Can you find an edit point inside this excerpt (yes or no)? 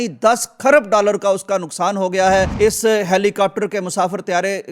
yes